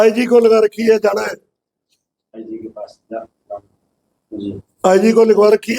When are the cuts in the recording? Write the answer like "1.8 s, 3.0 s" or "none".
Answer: none

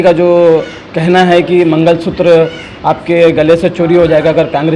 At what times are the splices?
none

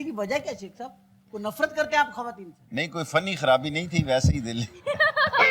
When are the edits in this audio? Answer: none

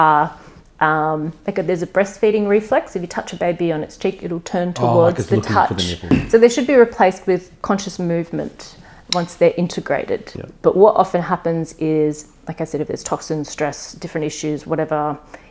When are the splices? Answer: 6.1 s, 10.3 s

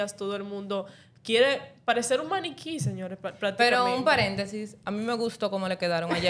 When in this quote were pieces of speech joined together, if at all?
none

